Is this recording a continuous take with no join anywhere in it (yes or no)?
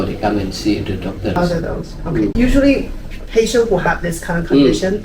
no